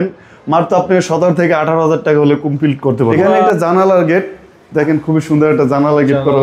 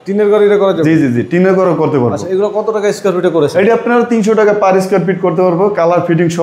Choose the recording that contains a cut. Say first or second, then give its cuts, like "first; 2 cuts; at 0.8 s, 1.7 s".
first; 1 cut; at 3.3 s